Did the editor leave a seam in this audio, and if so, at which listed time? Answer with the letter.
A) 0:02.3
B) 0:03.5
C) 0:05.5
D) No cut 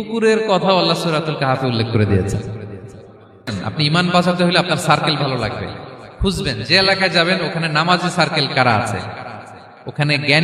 B